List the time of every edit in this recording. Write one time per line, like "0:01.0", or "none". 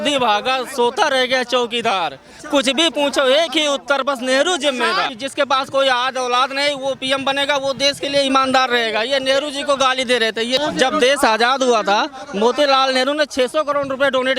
0:05.1
0:10.6